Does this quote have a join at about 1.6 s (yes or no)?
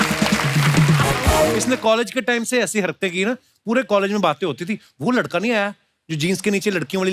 yes